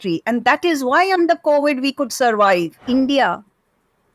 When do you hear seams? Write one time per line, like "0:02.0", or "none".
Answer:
0:02.8